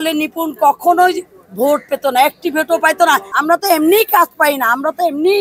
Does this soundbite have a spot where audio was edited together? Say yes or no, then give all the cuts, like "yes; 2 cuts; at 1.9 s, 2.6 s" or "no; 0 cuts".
yes; 1 cut; at 3.3 s